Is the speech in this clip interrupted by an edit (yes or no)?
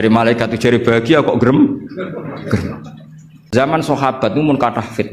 yes